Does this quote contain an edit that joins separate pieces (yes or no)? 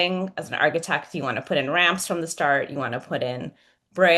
no